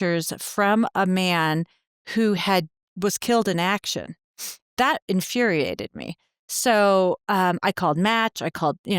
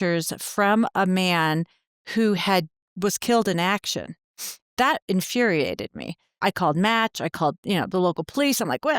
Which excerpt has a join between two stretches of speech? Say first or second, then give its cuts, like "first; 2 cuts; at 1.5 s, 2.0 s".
second; 1 cut; at 6.4 s